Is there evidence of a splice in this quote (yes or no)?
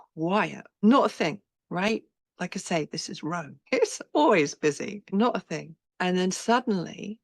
yes